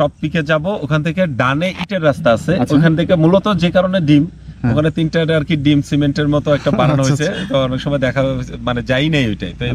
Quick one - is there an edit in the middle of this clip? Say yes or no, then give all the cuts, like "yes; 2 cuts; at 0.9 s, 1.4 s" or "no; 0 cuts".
no; 0 cuts